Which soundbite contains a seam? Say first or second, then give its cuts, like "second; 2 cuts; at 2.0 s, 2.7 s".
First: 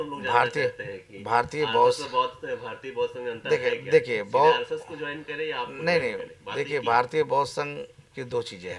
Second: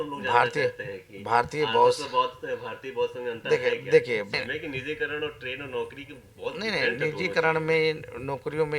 second; 1 cut; at 4.3 s